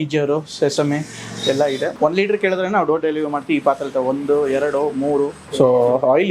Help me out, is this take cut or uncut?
cut